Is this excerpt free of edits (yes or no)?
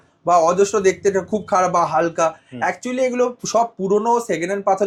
yes